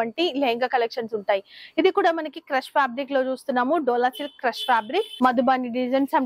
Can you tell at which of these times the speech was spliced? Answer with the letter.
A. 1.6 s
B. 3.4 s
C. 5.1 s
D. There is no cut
C